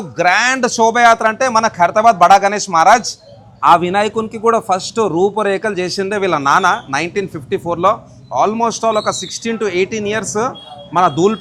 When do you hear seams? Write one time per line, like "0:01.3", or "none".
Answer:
none